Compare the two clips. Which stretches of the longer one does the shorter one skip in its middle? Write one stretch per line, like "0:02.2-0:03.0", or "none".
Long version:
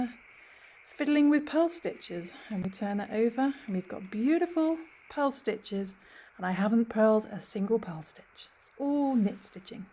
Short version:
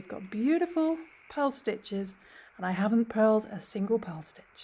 none